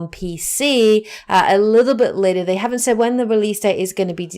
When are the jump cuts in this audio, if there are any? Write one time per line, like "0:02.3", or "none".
0:01.7